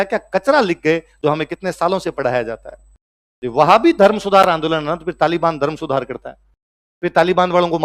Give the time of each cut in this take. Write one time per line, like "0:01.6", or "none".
none